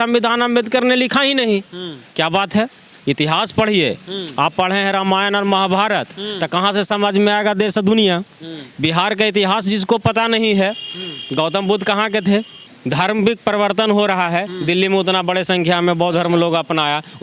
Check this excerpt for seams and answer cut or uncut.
uncut